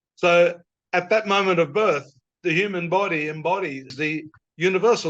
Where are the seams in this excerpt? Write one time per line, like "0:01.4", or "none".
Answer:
0:03.9